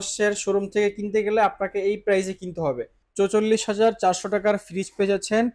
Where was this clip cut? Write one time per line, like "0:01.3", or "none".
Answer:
0:03.0